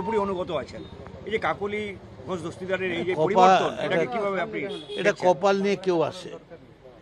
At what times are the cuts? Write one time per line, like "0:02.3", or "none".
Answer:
none